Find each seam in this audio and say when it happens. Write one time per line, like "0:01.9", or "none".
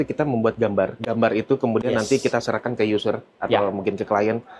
0:01.0

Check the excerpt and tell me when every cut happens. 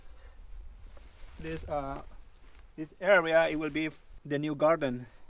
0:04.1

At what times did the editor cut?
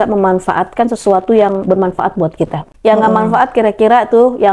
0:02.6

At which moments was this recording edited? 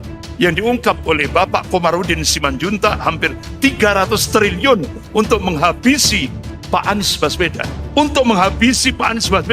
none

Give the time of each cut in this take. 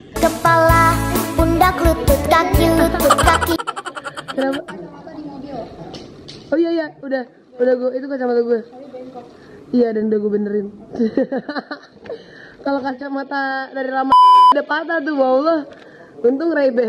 none

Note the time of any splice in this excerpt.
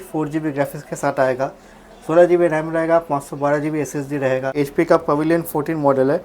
0:04.5

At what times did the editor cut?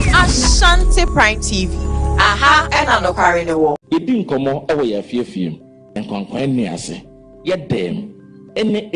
0:03.8

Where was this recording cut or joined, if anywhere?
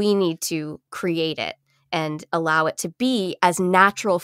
none

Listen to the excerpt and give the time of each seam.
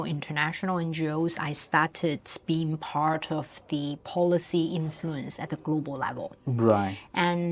none

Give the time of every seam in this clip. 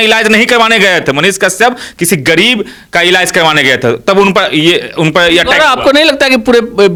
none

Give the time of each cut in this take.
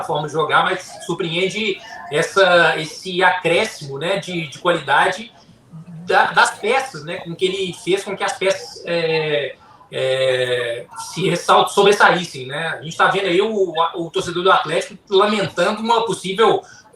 none

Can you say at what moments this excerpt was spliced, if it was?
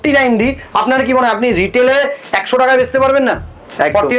none

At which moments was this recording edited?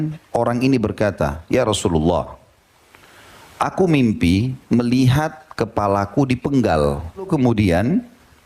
0:07.3

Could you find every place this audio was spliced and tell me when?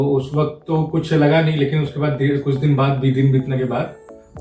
none

